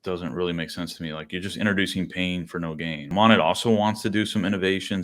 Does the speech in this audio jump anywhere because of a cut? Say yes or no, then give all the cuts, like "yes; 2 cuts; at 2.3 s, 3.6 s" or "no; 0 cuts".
yes; 1 cut; at 3.1 s